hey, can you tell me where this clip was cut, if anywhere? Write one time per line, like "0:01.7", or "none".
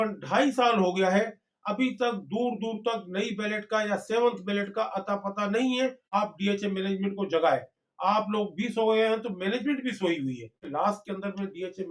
0:06.0
0:10.6